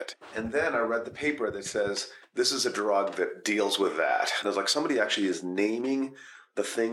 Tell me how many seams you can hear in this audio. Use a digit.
2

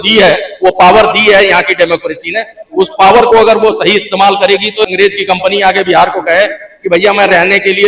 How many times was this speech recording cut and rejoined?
1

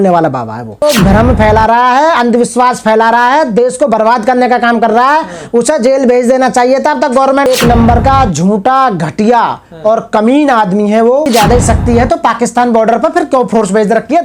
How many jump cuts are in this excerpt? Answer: 3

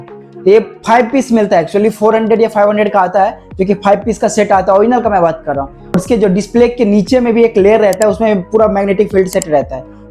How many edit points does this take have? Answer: 1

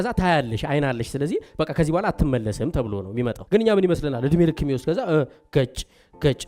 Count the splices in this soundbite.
1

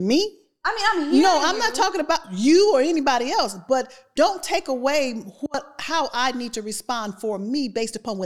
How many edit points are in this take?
0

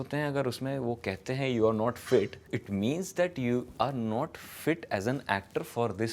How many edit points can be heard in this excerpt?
1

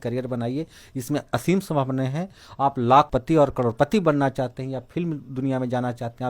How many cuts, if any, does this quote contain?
1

